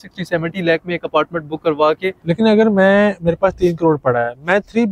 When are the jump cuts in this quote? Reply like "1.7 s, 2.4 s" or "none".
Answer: 2.2 s